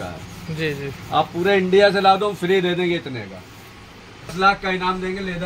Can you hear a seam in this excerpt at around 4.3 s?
yes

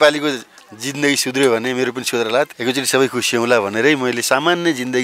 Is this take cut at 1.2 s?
no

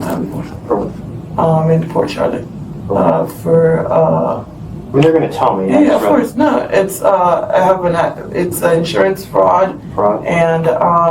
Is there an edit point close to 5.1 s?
no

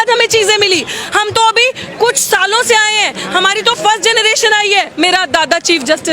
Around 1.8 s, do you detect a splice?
no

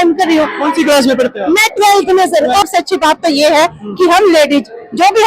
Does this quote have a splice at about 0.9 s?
no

